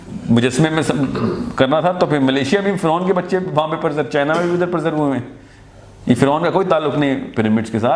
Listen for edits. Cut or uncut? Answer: uncut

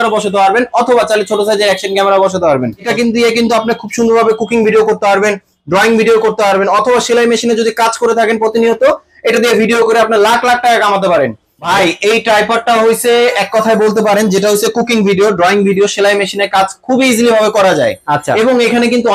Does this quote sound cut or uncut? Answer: cut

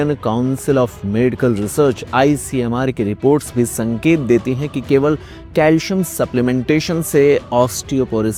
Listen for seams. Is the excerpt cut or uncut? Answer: uncut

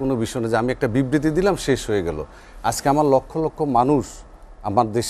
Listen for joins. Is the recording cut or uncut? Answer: uncut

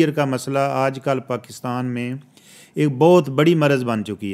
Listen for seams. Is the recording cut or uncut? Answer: uncut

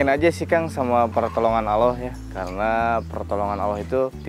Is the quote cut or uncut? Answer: uncut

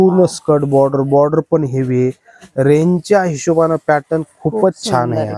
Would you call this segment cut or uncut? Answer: uncut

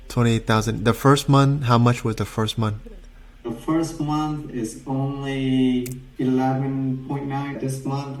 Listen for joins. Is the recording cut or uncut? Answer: uncut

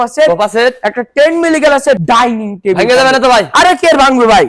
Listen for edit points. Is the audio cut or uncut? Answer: uncut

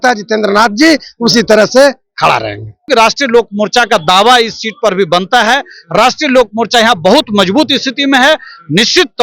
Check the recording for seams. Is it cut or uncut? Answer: cut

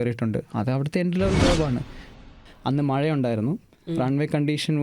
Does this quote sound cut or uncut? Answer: cut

